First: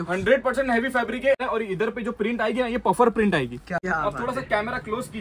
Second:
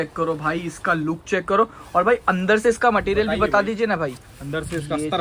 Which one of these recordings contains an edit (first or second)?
first